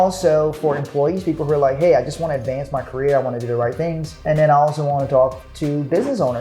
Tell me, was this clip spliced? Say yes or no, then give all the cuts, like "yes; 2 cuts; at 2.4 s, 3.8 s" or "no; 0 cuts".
yes; 2 cuts; at 4.2 s, 5.4 s